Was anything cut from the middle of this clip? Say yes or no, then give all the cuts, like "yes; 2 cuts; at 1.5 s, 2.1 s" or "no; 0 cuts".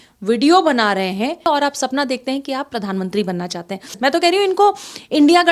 yes; 2 cuts; at 1.5 s, 4.0 s